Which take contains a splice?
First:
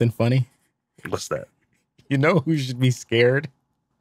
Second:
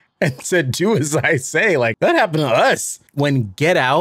second; 2 cuts; at 1.9 s, 3.0 s

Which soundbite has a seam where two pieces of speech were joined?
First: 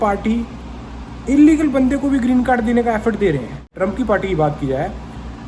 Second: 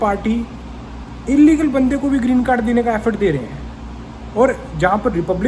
first; 1 cut; at 3.7 s

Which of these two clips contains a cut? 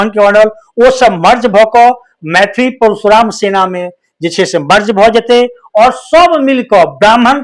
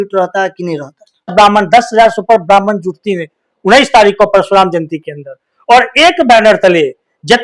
second; 1 cut; at 1.3 s

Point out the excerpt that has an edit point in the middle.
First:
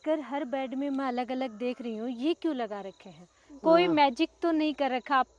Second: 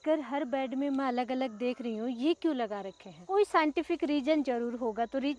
second; 1 cut; at 3.2 s

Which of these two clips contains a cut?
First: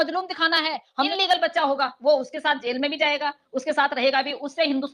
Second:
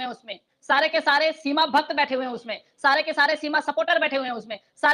first; 1 cut; at 1.1 s

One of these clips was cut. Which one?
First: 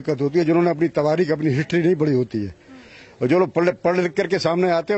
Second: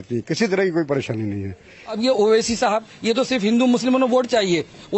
second; 1 cut; at 2.0 s

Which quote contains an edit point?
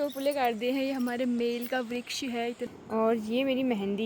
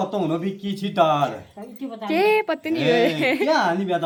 first; 1 cut; at 2.6 s

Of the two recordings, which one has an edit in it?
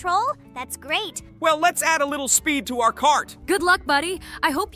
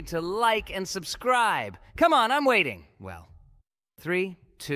first; 2 cuts; at 1.3 s, 3.3 s

